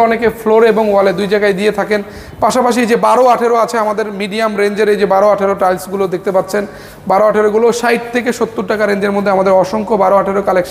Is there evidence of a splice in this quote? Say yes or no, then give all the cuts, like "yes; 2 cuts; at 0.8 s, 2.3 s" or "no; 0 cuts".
no; 0 cuts